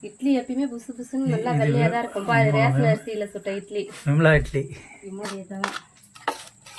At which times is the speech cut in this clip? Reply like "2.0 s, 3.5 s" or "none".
5.3 s